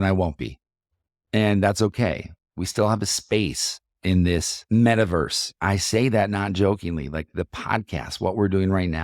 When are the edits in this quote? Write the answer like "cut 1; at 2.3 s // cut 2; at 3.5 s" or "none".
cut 1; at 4.6 s // cut 2; at 5.5 s